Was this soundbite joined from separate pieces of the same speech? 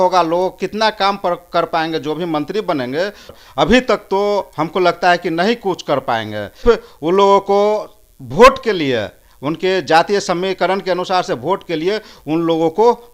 yes; 2 cuts; at 3.3 s, 6.6 s

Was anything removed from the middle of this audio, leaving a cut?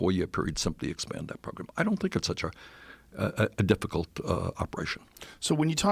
yes; 1 cut; at 1.8 s

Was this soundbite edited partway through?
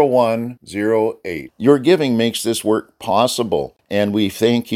yes; 1 cut; at 3.8 s

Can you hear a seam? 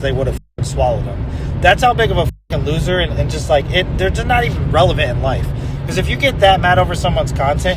no; 0 cuts

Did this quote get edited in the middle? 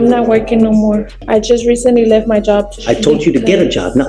yes; 2 cuts; at 1.1 s, 2.7 s

